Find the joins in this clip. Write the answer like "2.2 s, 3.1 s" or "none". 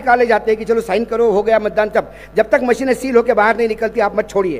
none